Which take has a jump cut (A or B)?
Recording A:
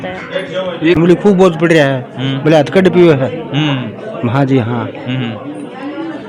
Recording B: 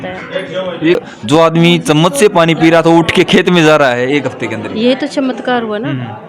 A